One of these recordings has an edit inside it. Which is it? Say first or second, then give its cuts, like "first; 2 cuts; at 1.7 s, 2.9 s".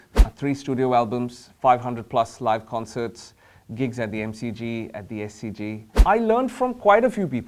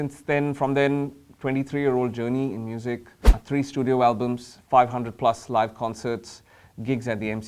first; 1 cut; at 5.9 s